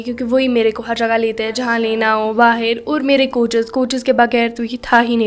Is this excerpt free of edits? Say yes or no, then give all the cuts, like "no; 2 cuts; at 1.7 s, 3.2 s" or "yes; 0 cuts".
yes; 0 cuts